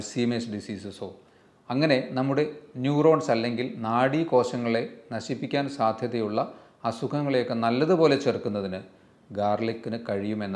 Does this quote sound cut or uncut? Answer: uncut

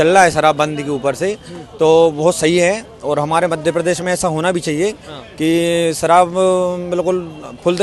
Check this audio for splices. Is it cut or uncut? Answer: uncut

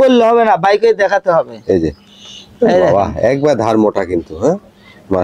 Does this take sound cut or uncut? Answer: uncut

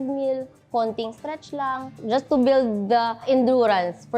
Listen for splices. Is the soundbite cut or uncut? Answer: cut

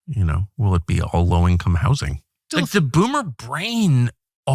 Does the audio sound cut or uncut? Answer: cut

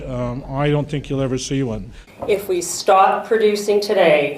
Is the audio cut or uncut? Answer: cut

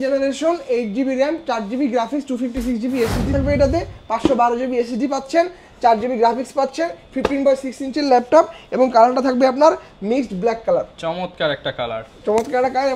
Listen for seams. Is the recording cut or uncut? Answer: cut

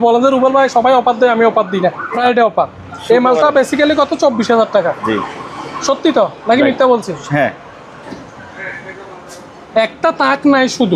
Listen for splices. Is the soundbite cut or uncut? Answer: cut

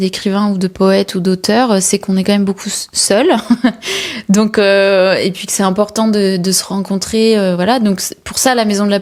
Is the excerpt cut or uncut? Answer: uncut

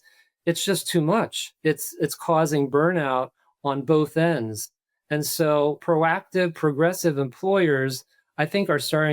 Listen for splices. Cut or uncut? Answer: cut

